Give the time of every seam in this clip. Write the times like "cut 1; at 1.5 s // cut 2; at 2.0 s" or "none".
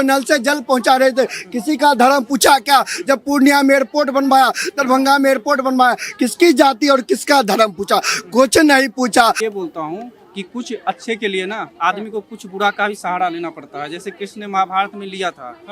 cut 1; at 9.4 s